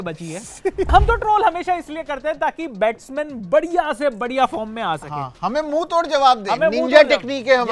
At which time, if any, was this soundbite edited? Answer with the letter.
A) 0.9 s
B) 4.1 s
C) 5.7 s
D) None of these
A